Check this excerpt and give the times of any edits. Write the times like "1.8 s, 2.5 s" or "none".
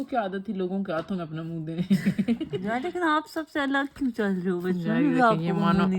2.5 s